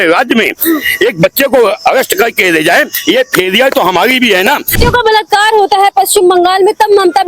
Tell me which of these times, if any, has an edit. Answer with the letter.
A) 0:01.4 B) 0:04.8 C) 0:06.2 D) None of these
B